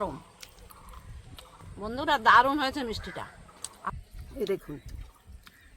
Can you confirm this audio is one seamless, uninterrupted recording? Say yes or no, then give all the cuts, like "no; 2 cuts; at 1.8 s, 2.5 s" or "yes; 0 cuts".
no; 2 cuts; at 1.6 s, 3.9 s